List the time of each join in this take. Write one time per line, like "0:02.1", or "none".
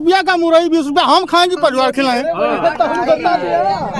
none

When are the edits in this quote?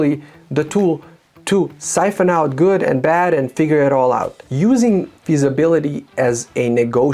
0:04.4

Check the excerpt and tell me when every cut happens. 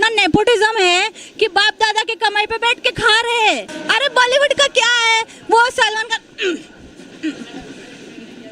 0:03.7

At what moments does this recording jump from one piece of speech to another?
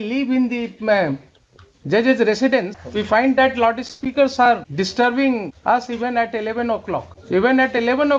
0:02.8
0:04.7
0:05.5
0:07.1

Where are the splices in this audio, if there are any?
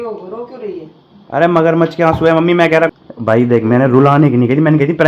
0:03.0

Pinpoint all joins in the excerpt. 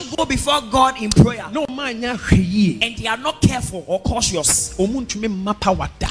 none

